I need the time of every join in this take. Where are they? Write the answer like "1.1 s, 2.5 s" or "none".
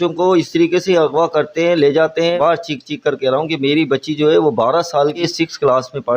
2.4 s, 5.2 s